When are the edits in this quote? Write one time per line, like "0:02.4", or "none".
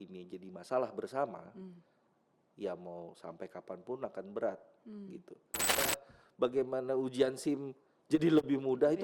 0:05.8